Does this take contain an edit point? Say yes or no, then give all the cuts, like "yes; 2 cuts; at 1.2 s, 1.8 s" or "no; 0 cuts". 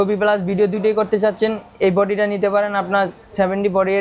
no; 0 cuts